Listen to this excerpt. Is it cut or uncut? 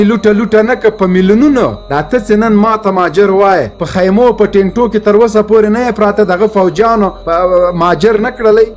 cut